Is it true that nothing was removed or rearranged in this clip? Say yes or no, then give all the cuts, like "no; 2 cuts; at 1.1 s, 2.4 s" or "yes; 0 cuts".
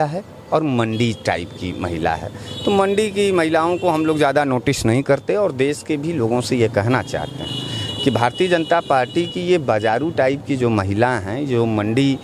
yes; 0 cuts